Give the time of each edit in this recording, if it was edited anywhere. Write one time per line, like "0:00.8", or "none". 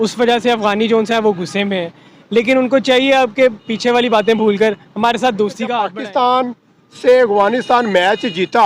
0:05.8